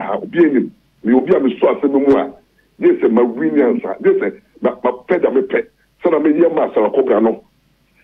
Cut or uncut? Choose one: uncut